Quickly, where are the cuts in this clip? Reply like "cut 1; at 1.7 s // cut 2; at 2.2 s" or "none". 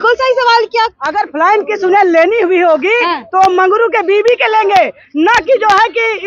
cut 1; at 1.0 s

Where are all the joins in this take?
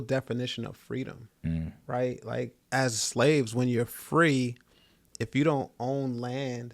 cut 1; at 1.2 s // cut 2; at 2.6 s

